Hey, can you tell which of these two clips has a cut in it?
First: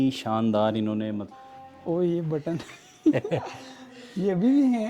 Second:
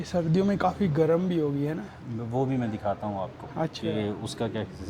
first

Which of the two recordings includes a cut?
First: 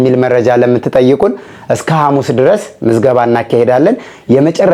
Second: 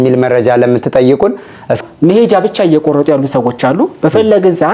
second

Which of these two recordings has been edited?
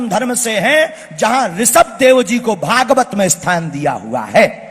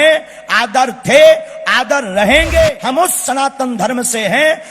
second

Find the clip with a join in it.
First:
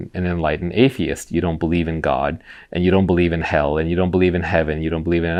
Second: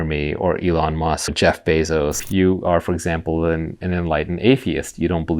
second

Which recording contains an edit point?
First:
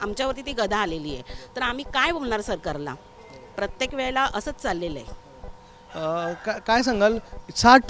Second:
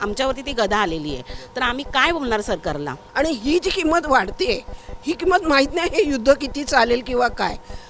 second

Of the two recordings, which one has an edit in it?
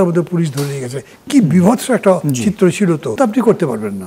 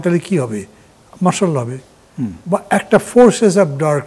first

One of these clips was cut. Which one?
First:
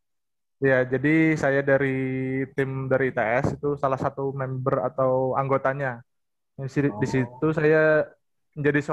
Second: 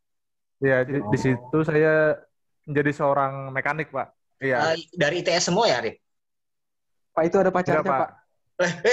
second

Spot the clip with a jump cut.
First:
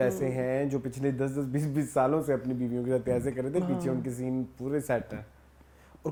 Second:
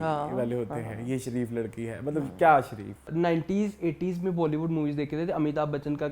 second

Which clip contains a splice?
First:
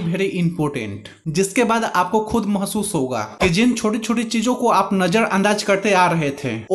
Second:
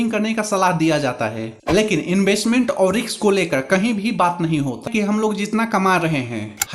second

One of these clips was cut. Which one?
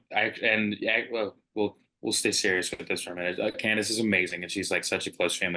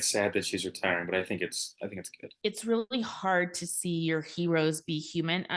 second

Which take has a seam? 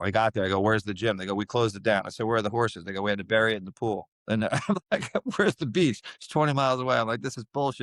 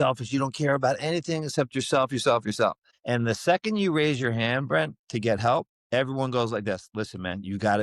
second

